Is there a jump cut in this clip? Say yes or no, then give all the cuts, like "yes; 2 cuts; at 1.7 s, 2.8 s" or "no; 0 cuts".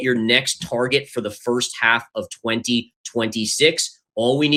no; 0 cuts